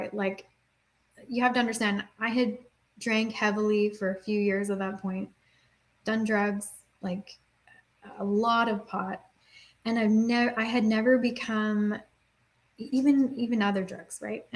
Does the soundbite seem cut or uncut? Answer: uncut